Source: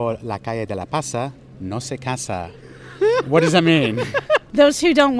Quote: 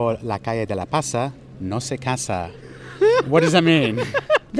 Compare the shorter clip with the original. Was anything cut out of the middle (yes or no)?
no